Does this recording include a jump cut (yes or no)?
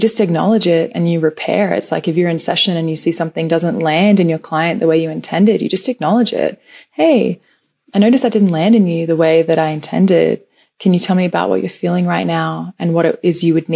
no